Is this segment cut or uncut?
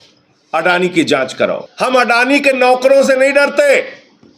cut